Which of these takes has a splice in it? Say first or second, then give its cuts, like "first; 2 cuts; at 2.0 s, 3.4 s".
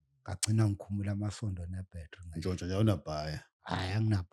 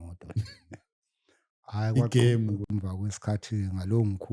second; 1 cut; at 2.7 s